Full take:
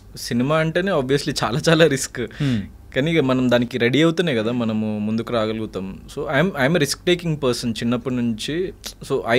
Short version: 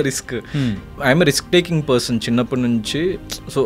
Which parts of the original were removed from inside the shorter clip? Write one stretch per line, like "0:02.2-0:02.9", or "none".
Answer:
0:02.9-0:06.5